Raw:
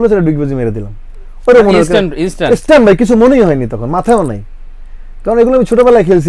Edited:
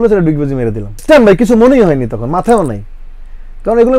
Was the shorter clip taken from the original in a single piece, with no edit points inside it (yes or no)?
no